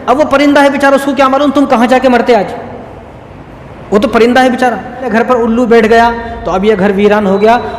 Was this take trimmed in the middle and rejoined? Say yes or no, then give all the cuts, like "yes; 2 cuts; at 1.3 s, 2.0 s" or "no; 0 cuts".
yes; 1 cut; at 5.1 s